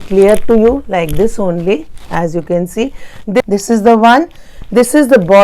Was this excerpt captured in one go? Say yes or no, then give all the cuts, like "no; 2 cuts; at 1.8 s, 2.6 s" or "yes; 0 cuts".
no; 1 cut; at 3.4 s